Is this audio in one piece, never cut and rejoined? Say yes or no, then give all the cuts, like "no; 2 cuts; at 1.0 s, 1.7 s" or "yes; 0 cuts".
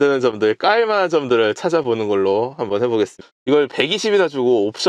no; 1 cut; at 3.2 s